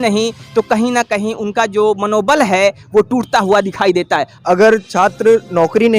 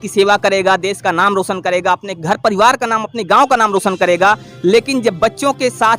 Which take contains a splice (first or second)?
first